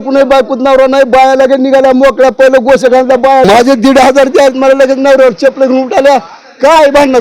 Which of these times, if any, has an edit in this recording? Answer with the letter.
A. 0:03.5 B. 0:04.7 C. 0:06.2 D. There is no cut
A